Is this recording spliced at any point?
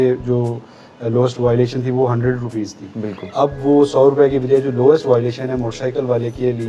no; 0 cuts

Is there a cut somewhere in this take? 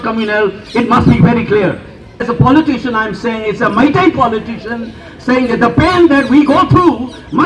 yes; 1 cut; at 2.2 s

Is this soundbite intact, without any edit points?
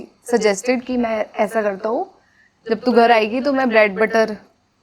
yes; 0 cuts

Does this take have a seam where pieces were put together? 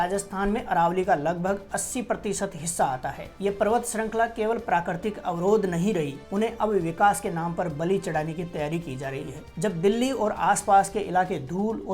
yes; 3 cuts; at 3.3 s, 6.2 s, 9.4 s

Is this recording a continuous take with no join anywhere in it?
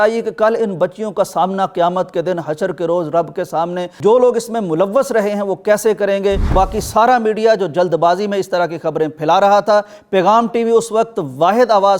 no; 2 cuts; at 3.9 s, 6.5 s

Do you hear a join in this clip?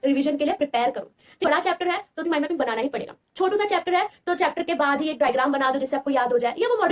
no; 0 cuts

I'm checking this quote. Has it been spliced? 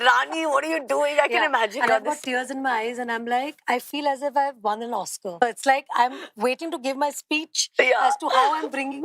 no; 0 cuts

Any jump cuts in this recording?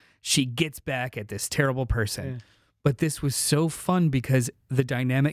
no; 0 cuts

